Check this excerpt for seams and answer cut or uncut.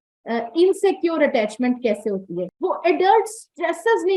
cut